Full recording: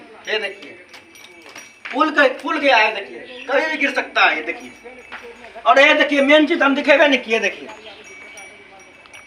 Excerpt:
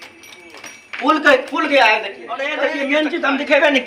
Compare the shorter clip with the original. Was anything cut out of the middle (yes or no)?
yes